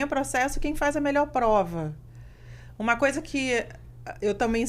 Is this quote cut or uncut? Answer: uncut